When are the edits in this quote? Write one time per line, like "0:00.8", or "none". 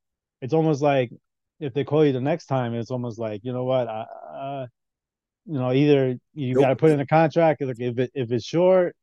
none